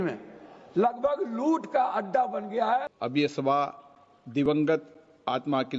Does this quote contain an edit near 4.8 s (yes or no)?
no